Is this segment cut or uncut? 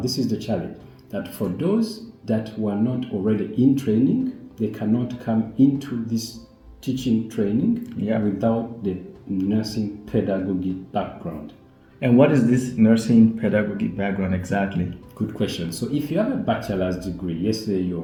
uncut